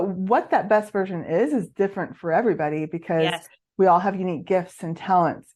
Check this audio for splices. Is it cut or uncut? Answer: uncut